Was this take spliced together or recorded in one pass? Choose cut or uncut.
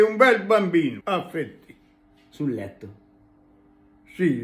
cut